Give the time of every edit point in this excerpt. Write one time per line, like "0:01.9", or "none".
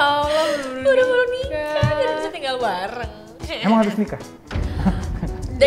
none